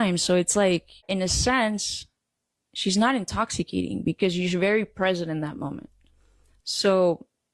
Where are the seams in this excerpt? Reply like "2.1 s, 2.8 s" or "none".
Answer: 1.0 s